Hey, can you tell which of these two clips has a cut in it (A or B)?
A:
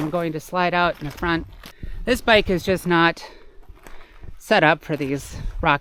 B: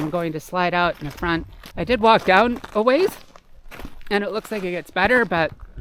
A